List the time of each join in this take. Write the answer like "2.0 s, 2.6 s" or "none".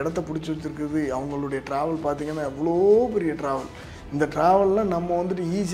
none